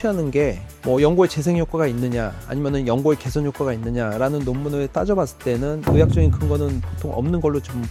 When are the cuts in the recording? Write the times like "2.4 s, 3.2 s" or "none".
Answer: none